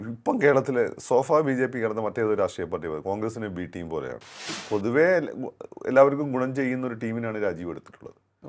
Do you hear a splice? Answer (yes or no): yes